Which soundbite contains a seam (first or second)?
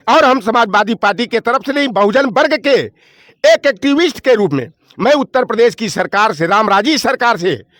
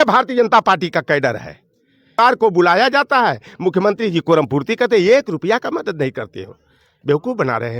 second